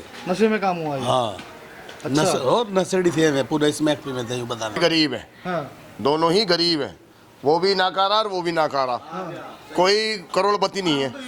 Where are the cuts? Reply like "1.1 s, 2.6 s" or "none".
4.8 s